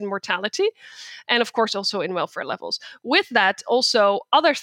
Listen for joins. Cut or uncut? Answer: uncut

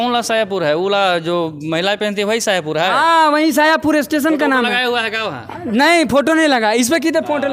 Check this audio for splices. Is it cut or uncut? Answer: uncut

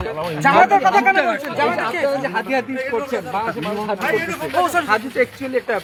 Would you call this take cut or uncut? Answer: uncut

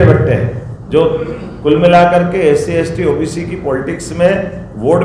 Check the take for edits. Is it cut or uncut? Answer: uncut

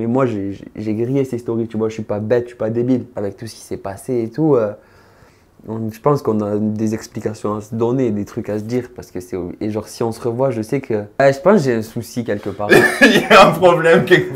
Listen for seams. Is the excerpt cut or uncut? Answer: cut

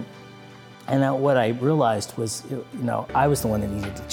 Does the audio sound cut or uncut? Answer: uncut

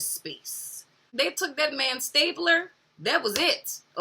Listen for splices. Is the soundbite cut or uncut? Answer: cut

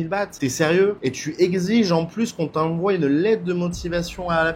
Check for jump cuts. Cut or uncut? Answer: uncut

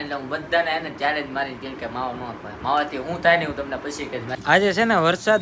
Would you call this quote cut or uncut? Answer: cut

